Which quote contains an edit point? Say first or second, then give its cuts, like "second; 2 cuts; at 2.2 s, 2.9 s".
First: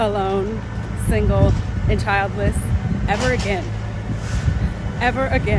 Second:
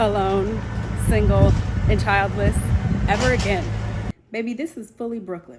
second; 1 cut; at 4.1 s